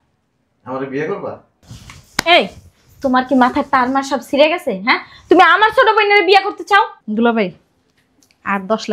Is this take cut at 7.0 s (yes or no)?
yes